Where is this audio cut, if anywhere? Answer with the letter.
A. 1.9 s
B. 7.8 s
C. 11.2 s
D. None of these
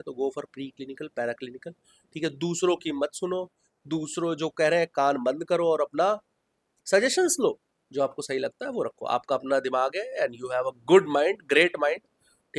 B